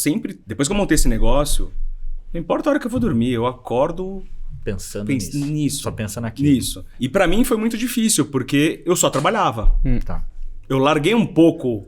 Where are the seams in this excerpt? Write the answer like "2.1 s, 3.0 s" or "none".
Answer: 6.8 s